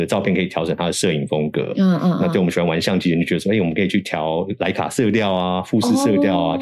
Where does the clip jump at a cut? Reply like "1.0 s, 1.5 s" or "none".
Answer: none

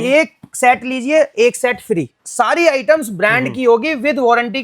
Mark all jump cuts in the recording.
2.2 s

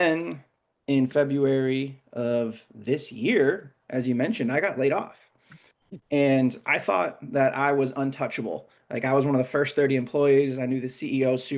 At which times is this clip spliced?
none

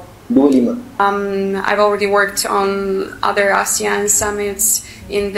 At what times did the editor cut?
1.0 s

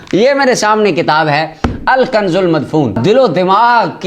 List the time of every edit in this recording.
3.0 s

